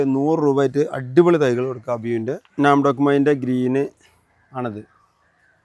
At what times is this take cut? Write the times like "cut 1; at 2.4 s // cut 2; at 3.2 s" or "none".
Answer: cut 1; at 2.4 s

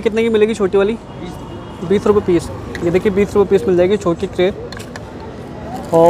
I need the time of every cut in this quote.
none

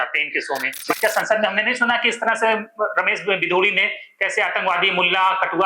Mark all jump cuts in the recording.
cut 1; at 1.0 s

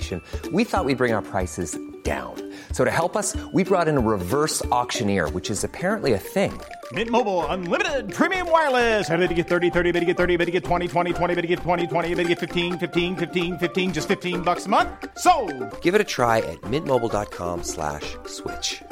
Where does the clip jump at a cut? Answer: none

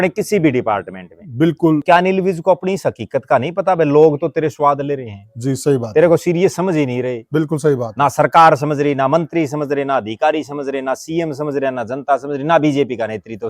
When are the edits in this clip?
cut 1; at 1.8 s

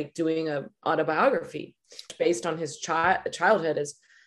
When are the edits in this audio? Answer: cut 1; at 2.1 s

